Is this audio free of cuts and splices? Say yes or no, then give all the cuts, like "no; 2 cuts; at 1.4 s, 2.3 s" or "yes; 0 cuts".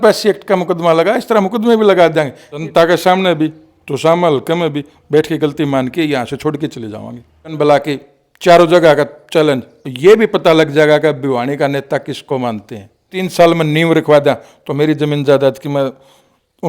no; 3 cuts; at 2.6 s, 7.5 s, 13.2 s